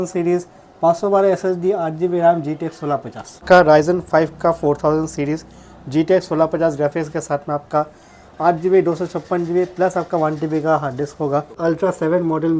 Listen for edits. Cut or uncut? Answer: cut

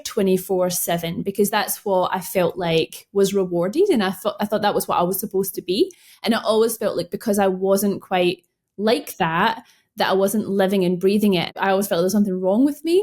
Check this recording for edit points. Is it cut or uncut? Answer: cut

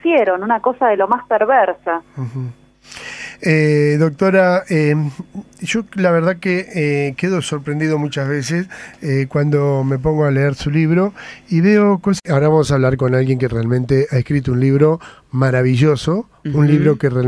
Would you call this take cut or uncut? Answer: uncut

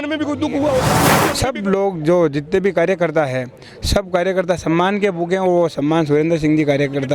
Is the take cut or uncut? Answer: cut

